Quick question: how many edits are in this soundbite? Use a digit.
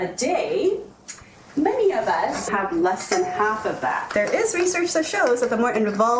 2